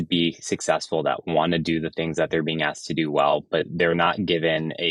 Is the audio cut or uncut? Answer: uncut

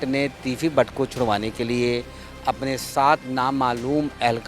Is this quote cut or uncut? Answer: uncut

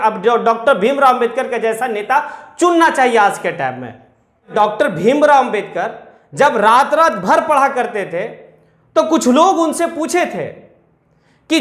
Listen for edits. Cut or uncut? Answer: cut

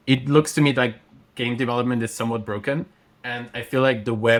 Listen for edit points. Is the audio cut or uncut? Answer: uncut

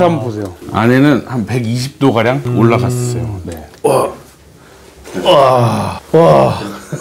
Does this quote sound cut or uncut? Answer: cut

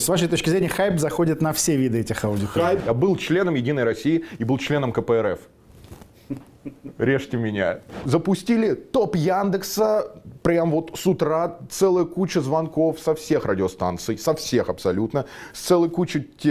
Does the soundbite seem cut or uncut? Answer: cut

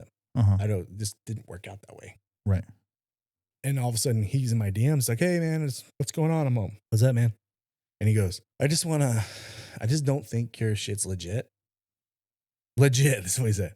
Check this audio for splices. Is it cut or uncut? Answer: cut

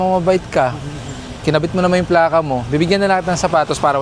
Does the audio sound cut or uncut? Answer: uncut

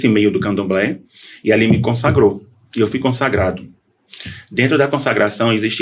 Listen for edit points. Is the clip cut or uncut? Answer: uncut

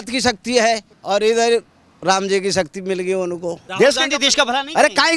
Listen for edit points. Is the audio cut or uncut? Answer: cut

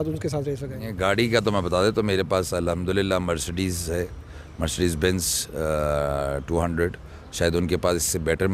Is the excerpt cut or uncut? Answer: uncut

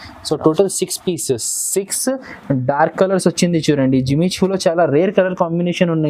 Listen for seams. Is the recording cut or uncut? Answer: uncut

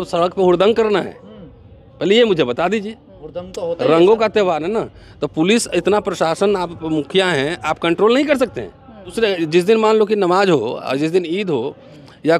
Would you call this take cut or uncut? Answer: cut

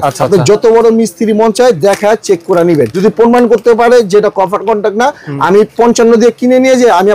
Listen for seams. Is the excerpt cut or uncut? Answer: cut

